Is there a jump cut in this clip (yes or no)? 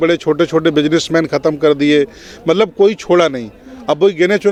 no